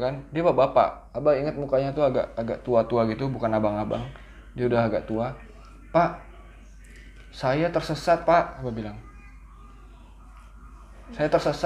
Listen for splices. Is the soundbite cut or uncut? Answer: uncut